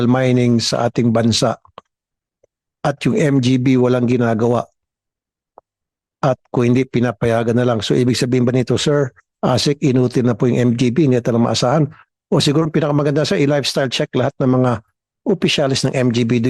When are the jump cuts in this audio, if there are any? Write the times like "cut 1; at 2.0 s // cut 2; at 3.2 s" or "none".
none